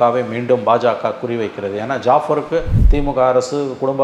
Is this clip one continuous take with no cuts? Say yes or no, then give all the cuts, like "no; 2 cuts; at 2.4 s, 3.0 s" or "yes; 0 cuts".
no; 1 cut; at 2.7 s